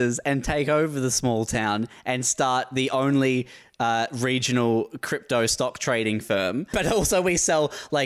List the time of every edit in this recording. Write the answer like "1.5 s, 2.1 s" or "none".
6.7 s